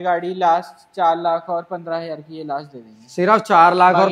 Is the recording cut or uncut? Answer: uncut